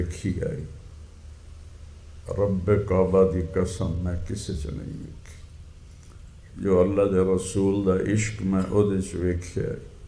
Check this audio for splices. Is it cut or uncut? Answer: uncut